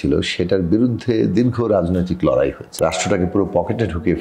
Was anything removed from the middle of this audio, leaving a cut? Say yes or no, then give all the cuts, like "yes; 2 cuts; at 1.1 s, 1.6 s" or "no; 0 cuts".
yes; 1 cut; at 2.6 s